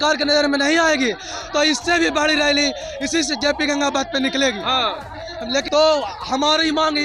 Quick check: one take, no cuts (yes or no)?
no